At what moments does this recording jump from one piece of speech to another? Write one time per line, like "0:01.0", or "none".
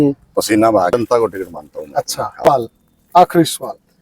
0:00.9
0:02.4